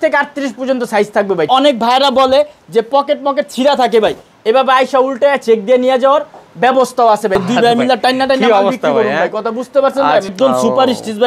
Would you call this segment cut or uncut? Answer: cut